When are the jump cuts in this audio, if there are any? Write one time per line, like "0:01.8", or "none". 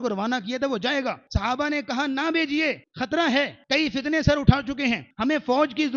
0:01.3
0:02.9
0:03.6
0:05.1